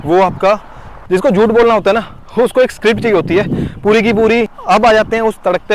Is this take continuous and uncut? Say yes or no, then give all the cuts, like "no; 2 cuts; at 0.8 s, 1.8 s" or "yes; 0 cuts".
no; 2 cuts; at 1.0 s, 4.5 s